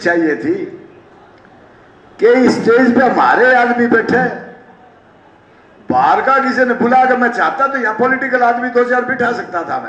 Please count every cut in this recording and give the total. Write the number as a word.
zero